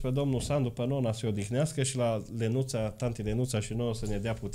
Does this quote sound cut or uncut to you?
uncut